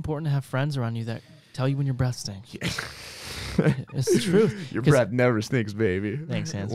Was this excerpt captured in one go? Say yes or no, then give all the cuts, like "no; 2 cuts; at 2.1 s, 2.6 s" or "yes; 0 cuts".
yes; 0 cuts